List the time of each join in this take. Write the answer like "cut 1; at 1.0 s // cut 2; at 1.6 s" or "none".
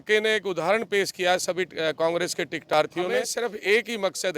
cut 1; at 3.3 s